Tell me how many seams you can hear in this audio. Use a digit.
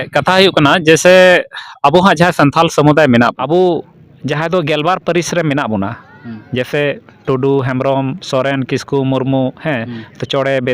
1